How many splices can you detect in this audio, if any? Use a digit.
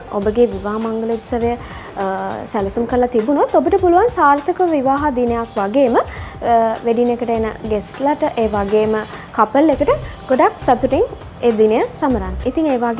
0